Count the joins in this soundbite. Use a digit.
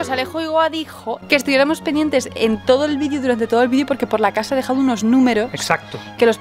1